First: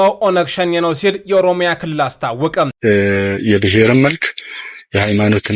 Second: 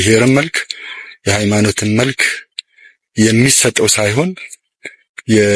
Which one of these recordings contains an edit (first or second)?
first